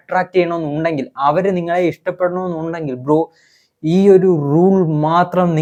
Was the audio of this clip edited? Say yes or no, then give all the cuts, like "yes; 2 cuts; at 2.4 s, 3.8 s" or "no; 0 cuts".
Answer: no; 0 cuts